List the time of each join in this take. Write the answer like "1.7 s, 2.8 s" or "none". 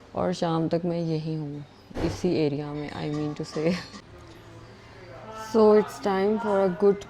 4.0 s